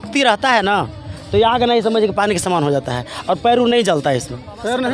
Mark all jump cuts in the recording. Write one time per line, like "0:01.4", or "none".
none